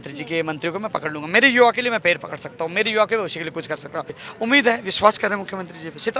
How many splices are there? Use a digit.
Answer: 1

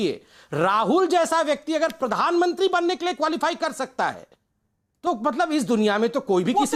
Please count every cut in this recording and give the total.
0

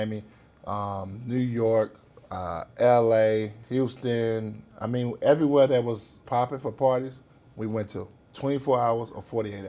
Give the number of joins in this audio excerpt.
3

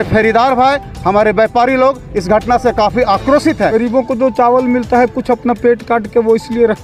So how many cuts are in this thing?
1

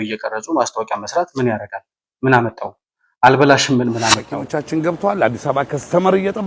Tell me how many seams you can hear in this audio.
1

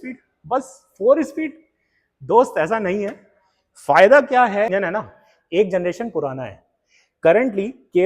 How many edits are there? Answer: 1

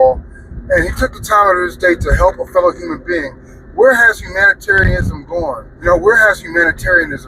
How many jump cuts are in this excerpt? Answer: 1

